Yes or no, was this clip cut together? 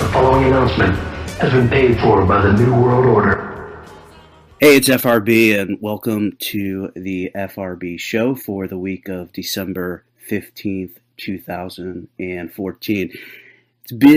no